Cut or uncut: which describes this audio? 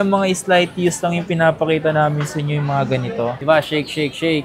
cut